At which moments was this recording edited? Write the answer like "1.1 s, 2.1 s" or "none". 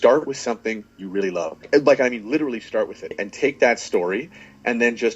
1.7 s, 3.2 s